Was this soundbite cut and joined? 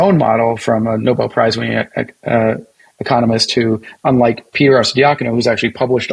no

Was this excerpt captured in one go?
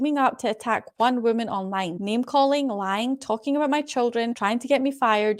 yes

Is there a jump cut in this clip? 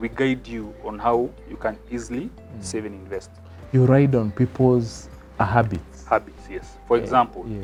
no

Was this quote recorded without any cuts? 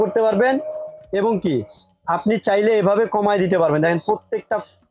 yes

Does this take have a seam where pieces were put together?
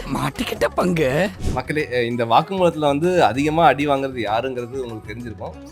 yes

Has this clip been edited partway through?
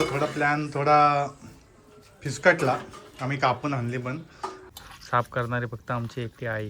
yes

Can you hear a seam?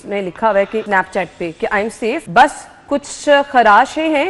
yes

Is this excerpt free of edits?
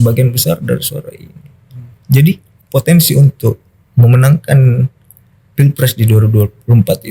no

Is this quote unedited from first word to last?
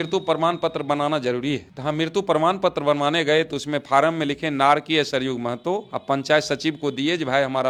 yes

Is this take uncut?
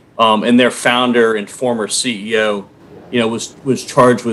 yes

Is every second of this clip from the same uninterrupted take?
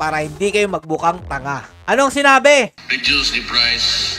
no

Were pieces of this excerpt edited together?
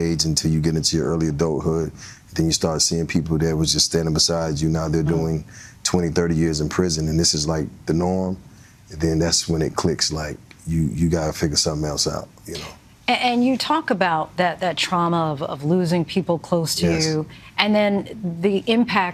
no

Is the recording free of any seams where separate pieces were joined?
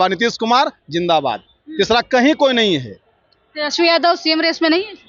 yes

